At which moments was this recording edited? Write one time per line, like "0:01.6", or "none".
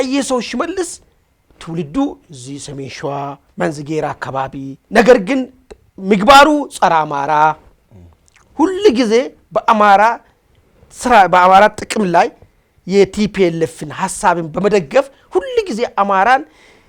0:03.4
0:04.8